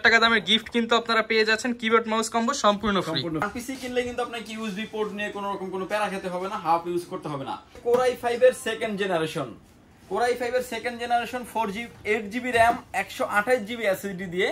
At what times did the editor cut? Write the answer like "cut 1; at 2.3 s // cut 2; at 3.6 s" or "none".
cut 1; at 3.5 s // cut 2; at 7.8 s